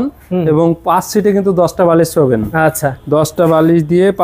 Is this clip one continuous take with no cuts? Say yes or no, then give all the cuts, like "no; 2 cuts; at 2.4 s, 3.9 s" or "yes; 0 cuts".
yes; 0 cuts